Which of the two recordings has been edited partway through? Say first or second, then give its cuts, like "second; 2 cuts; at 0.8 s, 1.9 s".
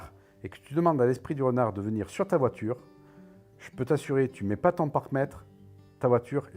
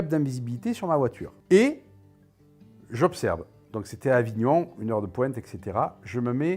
second; 1 cut; at 1.3 s